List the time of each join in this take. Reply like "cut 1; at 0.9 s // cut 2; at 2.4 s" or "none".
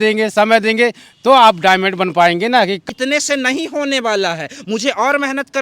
cut 1; at 2.8 s